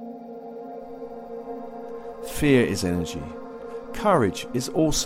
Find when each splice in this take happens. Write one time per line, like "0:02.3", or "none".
0:01.8

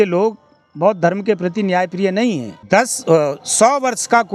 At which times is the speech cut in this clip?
0:02.5

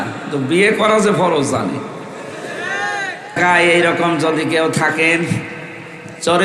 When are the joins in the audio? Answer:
0:03.4

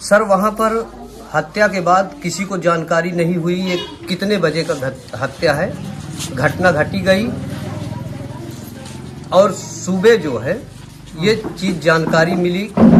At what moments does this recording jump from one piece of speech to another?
none

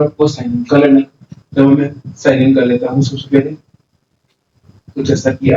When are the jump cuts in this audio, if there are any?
0:01.2

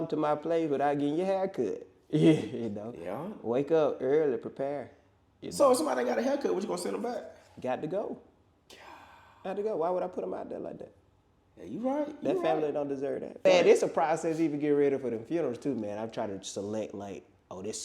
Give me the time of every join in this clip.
0:13.4

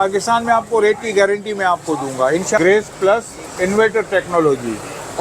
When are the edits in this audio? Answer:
0:02.6

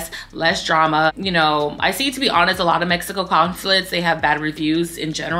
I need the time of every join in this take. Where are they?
none

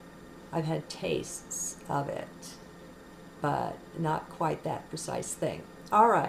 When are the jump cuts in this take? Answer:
none

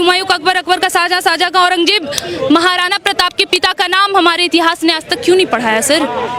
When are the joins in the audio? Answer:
none

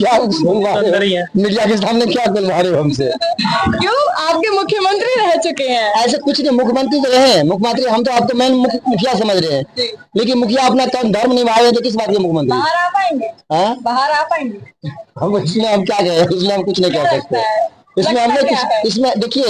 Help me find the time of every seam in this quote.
none

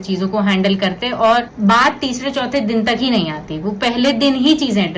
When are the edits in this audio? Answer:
0:01.5

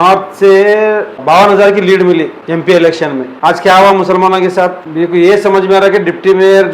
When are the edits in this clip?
0:01.2
0:02.4
0:03.3
0:04.8

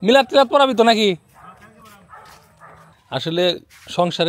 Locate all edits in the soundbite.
0:03.0

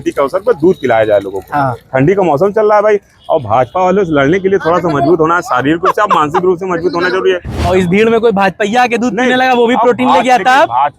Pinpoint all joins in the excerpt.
0:07.6

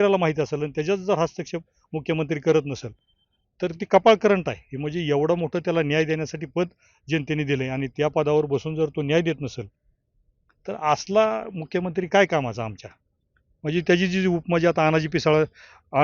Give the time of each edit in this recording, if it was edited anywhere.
none

